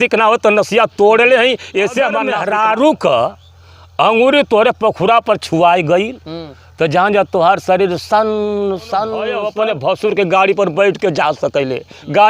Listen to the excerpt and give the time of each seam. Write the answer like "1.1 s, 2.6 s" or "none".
2.3 s, 9.4 s